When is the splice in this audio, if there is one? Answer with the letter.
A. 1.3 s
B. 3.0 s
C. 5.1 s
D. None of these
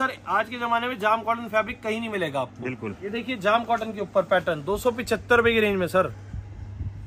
B